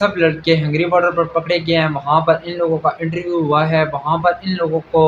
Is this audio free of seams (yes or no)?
yes